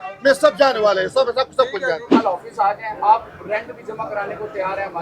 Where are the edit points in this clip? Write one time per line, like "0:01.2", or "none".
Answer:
0:02.1

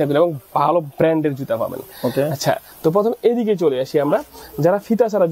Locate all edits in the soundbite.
none

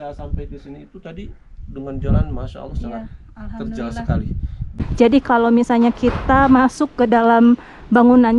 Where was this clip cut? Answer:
0:04.8

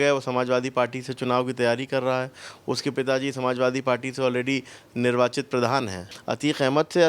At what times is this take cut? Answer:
0:06.1

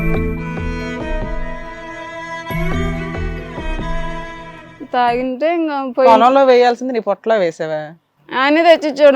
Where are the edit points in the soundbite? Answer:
0:04.8

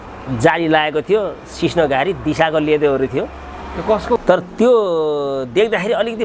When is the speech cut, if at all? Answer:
0:04.2

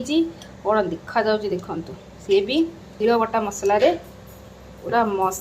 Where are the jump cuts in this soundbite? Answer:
0:02.9

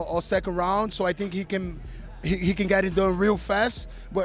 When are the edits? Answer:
none

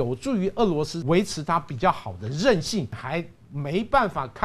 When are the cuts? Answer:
0:01.0
0:02.9

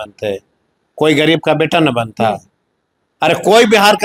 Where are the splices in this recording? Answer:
none

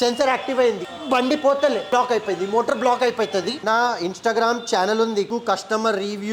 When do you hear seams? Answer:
0:00.9
0:01.9
0:03.6
0:05.3

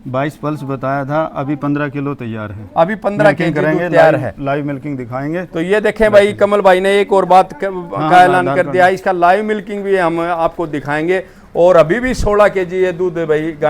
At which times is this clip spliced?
none

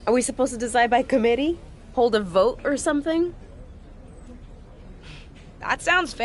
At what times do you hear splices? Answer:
0:03.4
0:05.3

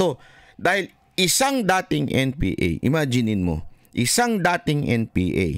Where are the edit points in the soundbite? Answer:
none

